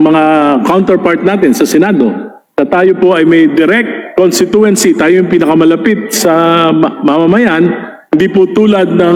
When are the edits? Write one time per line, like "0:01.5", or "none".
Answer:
none

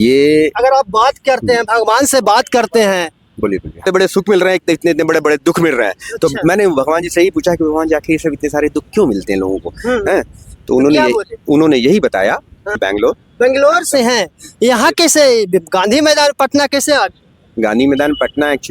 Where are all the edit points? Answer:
0:03.9
0:12.8

